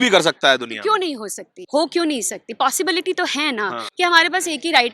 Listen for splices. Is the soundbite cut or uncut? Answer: cut